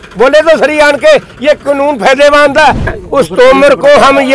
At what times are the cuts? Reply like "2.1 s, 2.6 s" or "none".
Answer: 3.0 s